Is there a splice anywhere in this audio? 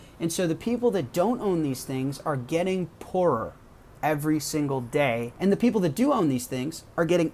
yes; 1 cut; at 5.3 s

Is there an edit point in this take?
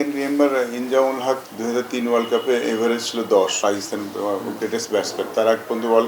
yes; 3 cuts; at 1.5 s, 3.5 s, 5.3 s

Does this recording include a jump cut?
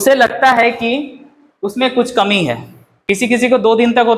yes; 1 cut; at 3.1 s

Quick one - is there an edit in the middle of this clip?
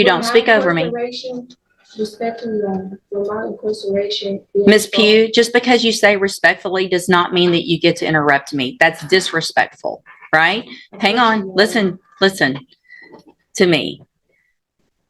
no; 0 cuts

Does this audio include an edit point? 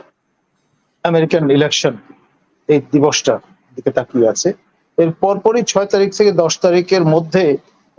no; 0 cuts

